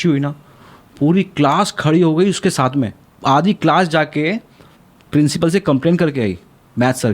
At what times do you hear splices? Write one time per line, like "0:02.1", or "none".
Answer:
0:03.0